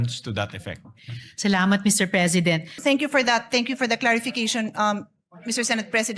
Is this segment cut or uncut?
cut